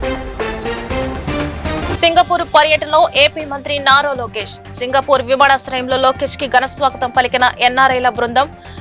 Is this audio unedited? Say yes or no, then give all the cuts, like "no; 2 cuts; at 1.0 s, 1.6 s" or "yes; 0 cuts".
no; 1 cut; at 1.2 s